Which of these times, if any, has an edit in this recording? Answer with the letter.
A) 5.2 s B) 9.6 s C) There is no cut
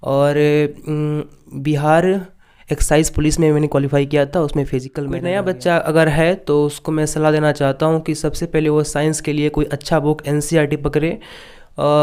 A